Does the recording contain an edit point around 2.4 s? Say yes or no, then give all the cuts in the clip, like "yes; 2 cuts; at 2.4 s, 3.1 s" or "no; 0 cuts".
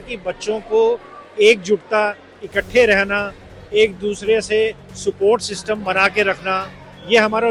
no; 0 cuts